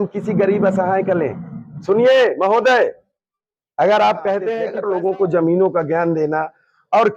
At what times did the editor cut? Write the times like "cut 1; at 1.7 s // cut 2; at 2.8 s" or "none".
cut 1; at 4.6 s